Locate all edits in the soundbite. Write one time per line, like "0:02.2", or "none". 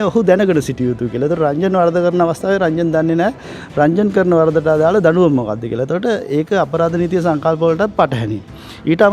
none